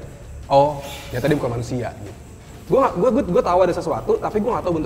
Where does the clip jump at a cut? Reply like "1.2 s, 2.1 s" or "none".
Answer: 2.4 s